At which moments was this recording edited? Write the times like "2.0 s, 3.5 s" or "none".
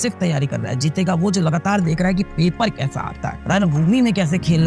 none